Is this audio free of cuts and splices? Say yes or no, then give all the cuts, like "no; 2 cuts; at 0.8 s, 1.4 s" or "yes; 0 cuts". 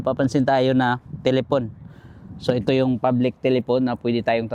yes; 0 cuts